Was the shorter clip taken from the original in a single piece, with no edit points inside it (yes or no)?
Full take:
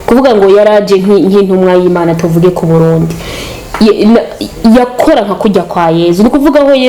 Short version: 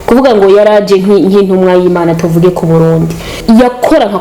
no